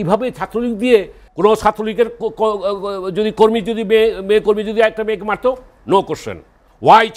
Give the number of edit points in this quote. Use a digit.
1